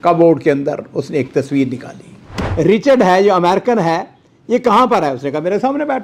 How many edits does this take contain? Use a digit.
1